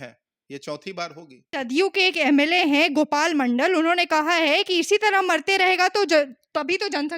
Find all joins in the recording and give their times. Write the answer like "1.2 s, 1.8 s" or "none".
1.5 s